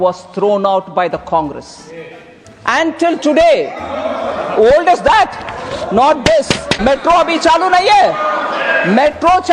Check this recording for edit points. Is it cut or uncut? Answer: cut